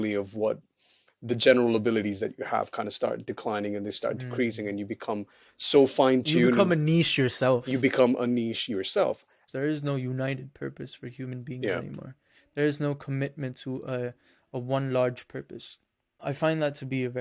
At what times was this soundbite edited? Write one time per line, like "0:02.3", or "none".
0:09.3
0:16.2